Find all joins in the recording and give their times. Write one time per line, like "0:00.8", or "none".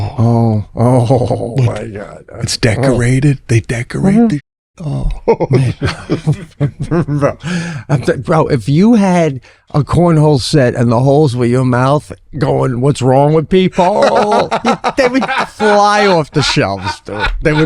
none

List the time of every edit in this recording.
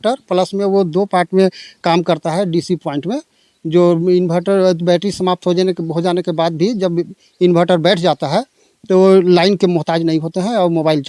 none

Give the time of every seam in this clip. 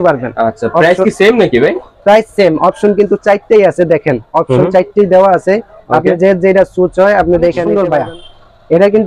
0:07.7

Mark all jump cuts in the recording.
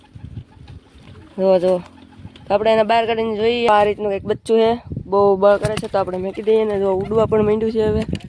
0:03.7

